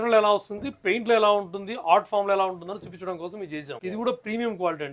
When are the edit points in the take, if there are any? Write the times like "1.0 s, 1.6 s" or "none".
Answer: 3.8 s